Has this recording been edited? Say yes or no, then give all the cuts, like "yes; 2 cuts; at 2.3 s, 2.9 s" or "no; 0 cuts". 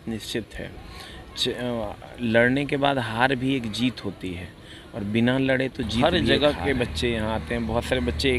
yes; 1 cut; at 6.0 s